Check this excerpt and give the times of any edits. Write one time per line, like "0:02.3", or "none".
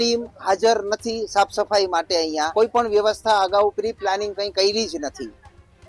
0:02.5